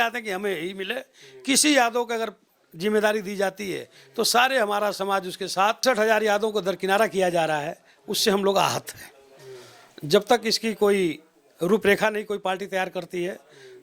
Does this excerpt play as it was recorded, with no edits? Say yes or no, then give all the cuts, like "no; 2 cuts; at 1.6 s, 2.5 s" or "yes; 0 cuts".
no; 1 cut; at 5.8 s